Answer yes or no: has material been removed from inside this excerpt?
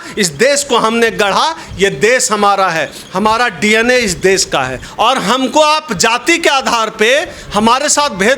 yes